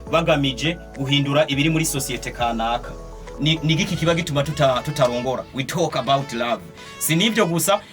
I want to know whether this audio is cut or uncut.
cut